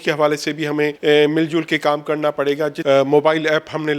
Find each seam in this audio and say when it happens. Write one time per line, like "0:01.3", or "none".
0:01.0
0:02.8